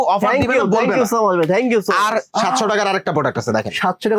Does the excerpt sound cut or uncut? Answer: cut